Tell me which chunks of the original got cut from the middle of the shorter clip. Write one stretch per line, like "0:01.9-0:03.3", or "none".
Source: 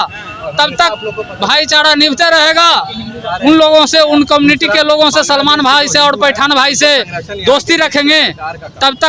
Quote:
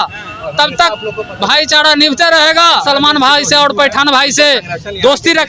0:02.8-0:05.3